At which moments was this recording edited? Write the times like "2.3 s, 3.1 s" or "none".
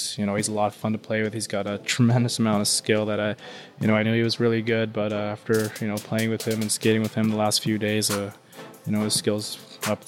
none